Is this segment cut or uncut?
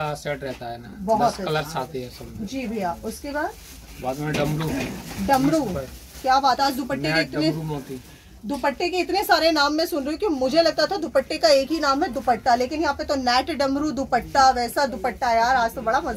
uncut